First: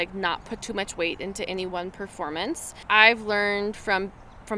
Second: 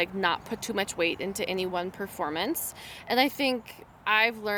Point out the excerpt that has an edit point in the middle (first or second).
first